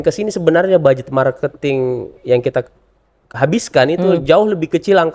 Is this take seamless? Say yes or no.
yes